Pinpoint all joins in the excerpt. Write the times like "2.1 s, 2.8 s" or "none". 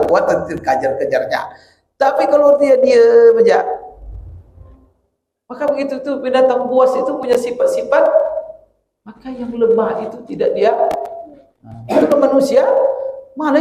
none